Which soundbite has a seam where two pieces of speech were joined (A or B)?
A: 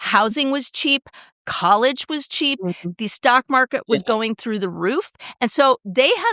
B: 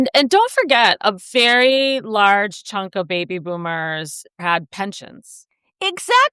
B